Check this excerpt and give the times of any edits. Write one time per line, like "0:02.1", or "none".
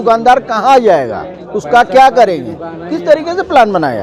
none

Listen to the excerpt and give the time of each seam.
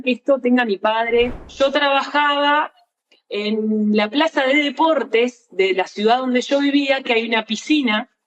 0:01.4

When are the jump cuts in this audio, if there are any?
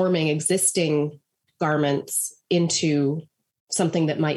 none

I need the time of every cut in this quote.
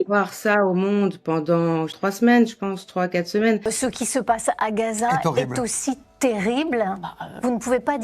0:02.0
0:03.7

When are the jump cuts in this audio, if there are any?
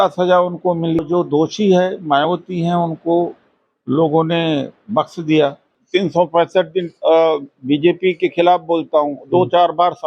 0:01.1
0:05.7

